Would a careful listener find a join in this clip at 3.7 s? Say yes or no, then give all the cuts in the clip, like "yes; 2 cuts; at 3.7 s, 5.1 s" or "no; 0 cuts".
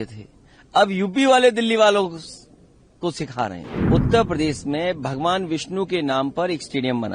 yes; 1 cut; at 3.7 s